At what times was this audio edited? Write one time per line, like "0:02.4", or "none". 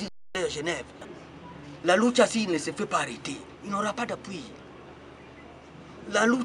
0:01.0